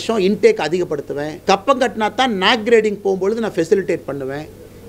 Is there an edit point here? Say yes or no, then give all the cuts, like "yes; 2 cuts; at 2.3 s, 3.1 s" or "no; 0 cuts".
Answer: yes; 1 cut; at 1.3 s